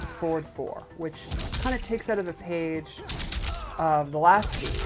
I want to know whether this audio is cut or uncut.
cut